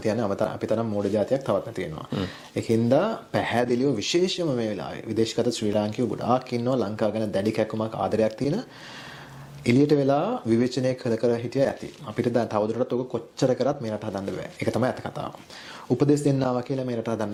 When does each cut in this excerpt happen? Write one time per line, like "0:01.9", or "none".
none

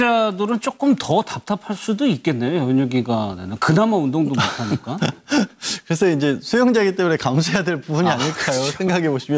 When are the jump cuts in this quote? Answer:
none

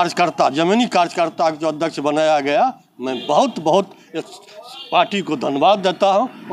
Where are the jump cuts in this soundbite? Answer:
none

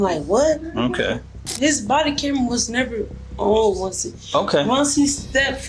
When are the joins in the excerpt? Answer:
0:01.5

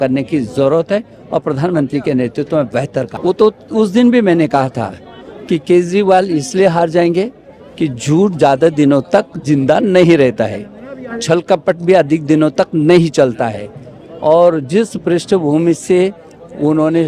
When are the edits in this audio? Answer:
0:03.1

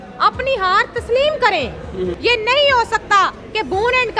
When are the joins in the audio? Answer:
0:02.1

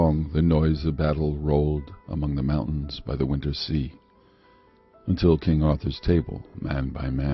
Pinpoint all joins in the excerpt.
0:02.8

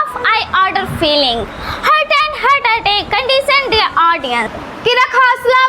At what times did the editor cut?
0:04.6

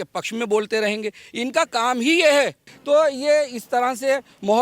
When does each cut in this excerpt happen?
0:02.7

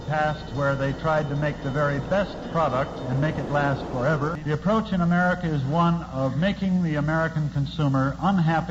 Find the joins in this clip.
0:04.4

